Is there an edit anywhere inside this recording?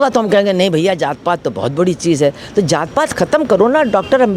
no; 0 cuts

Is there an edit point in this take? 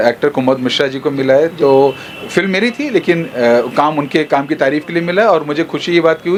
no; 0 cuts

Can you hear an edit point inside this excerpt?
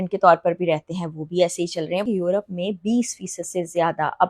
yes; 1 cut; at 2.0 s

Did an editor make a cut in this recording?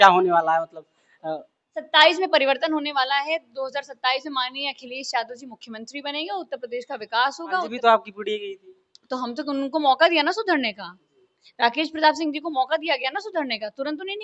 yes; 1 cut; at 7.7 s

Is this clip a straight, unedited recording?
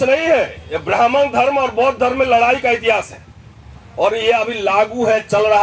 yes; 0 cuts

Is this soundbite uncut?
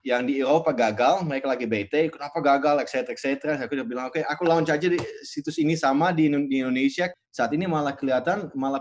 no; 1 cut; at 7.1 s

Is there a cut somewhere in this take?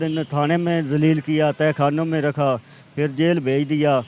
no; 0 cuts

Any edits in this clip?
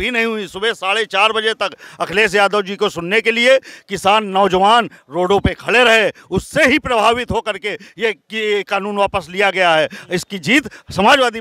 no; 0 cuts

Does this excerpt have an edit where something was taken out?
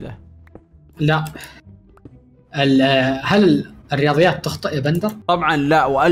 yes; 1 cut; at 5.2 s

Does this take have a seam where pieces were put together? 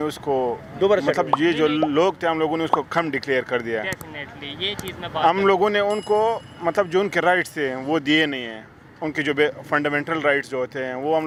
no; 0 cuts

